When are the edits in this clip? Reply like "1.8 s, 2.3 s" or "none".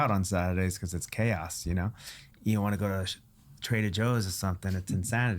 2.3 s